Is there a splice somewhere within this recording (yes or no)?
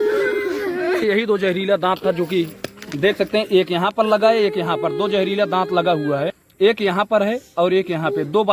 yes